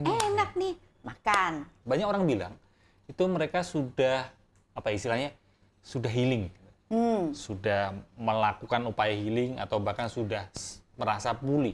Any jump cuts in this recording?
yes; 1 cut; at 1.7 s

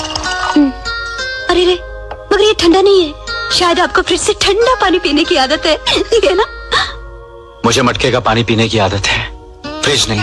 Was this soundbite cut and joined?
no; 0 cuts

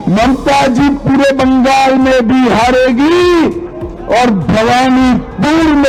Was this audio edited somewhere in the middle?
no; 0 cuts

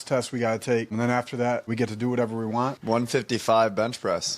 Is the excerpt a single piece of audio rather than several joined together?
no; 1 cut; at 2.8 s

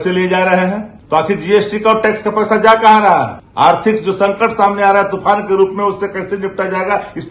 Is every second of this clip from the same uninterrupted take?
no; 2 cuts; at 0.9 s, 3.4 s

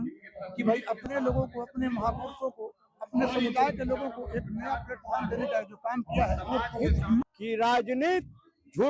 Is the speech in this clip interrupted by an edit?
yes; 1 cut; at 7.3 s

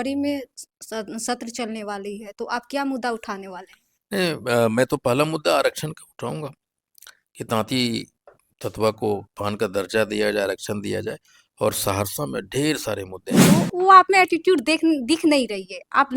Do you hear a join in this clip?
yes; 1 cut; at 13.5 s

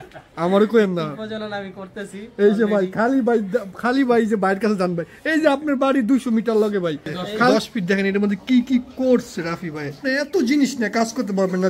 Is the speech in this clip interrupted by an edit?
yes; 2 cuts; at 7.5 s, 10.0 s

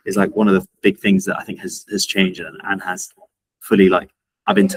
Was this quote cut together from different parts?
no; 0 cuts

